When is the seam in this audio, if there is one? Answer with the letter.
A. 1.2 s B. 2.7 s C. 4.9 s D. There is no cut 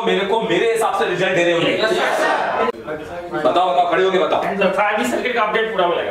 B